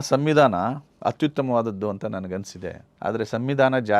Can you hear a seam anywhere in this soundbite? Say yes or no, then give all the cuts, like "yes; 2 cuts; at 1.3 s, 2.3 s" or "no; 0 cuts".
no; 0 cuts